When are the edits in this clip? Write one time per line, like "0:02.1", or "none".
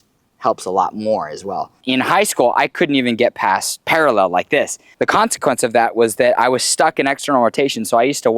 0:01.8
0:03.7
0:04.8